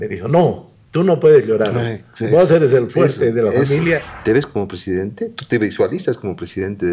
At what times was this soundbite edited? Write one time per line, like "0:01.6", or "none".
0:04.1